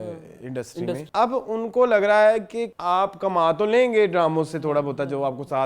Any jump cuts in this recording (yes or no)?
yes